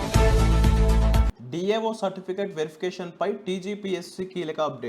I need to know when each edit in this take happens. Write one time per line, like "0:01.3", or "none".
0:01.3